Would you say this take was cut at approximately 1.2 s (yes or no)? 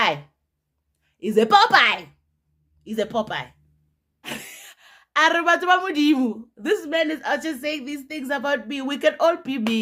no